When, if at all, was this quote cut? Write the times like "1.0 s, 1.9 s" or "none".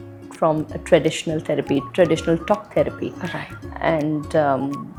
none